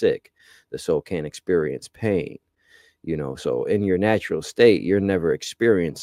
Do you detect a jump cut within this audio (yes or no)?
no